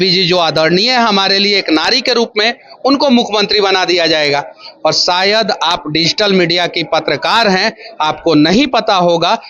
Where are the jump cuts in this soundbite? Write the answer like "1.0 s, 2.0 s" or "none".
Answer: none